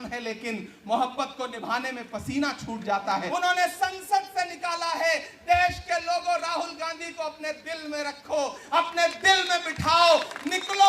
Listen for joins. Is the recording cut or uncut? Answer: cut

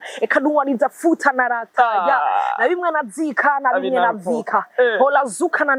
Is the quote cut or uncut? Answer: uncut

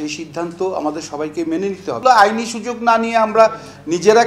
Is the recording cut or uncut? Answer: cut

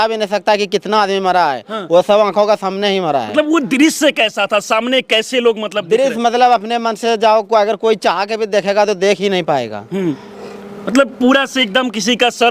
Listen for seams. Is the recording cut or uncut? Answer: uncut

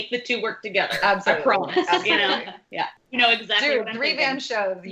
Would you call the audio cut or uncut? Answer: cut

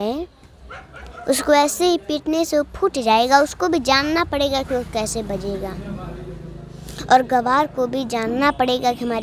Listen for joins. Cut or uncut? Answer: uncut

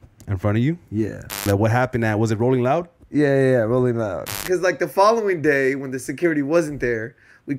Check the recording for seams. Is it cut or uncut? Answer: cut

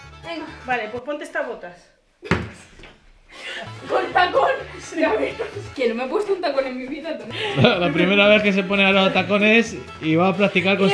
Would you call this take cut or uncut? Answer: cut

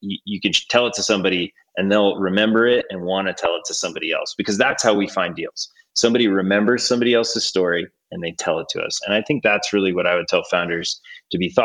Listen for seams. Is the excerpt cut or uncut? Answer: uncut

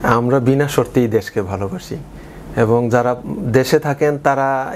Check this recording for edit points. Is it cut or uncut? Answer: uncut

